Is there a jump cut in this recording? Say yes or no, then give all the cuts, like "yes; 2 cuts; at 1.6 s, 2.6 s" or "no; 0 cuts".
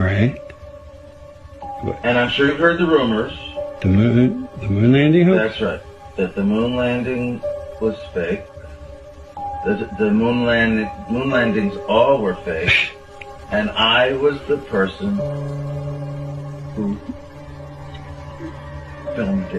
no; 0 cuts